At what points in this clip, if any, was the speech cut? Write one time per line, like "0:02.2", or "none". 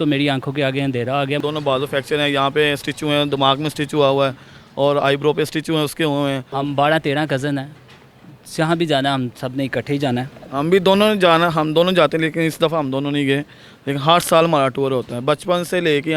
0:01.4
0:06.5
0:10.4